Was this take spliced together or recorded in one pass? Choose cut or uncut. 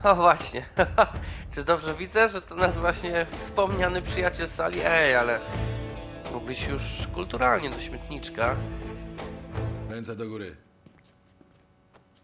cut